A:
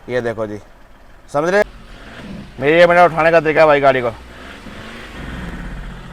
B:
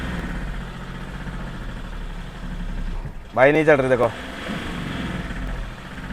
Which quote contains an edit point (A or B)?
A